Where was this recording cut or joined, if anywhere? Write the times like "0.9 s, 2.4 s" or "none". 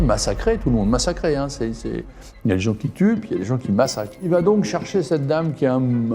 4.2 s

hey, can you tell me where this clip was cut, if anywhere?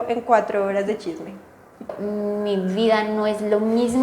2.0 s

